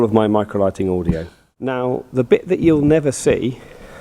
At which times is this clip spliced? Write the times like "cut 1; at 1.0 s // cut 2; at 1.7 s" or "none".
cut 1; at 1.7 s